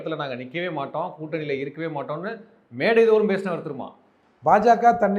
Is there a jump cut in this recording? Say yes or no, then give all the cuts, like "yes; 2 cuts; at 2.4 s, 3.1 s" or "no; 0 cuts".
no; 0 cuts